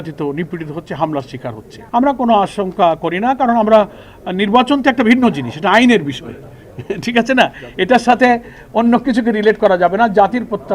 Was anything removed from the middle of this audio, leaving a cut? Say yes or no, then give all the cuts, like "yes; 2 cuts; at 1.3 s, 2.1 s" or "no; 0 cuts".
yes; 1 cut; at 1.7 s